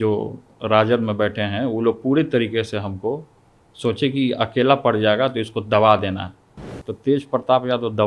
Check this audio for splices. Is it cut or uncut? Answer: uncut